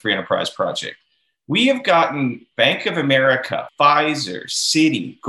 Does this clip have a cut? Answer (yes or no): yes